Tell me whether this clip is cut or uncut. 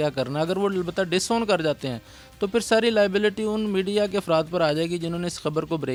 uncut